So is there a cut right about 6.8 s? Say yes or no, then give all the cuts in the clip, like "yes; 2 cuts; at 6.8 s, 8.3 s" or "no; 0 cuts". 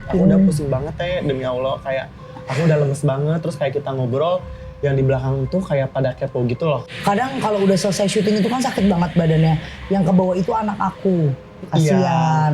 yes; 1 cut; at 6.8 s